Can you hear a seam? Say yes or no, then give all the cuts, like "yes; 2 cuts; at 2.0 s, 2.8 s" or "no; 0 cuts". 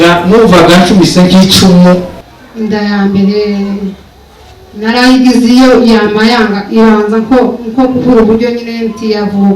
yes; 1 cut; at 2.2 s